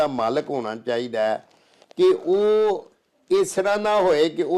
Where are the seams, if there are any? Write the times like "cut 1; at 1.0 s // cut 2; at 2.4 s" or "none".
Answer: none